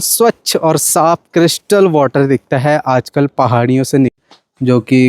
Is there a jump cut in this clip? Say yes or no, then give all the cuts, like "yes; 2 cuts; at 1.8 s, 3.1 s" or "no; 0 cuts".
yes; 1 cut; at 4.1 s